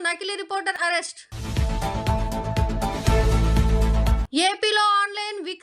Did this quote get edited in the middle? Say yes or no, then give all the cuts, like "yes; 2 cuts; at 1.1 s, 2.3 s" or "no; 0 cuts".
yes; 2 cuts; at 0.9 s, 4.2 s